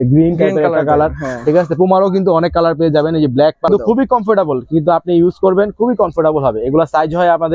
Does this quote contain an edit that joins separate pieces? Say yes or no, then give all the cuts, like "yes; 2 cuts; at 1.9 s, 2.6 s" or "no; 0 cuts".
yes; 1 cut; at 3.7 s